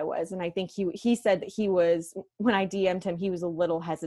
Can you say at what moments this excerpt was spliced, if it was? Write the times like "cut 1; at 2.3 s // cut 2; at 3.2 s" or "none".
none